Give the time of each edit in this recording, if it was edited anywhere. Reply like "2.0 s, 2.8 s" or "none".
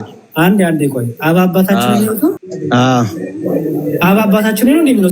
2.5 s